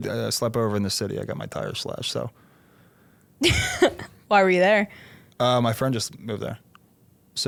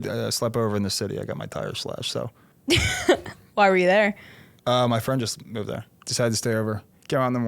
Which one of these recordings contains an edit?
second; 2 cuts; at 2.5 s, 6.0 s

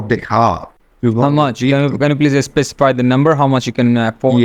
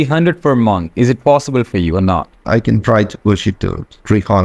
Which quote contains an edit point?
second; 1 cut; at 2.4 s

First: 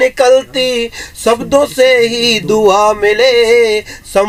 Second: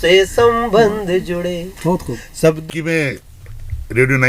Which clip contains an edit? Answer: second; 1 cut; at 2.6 s

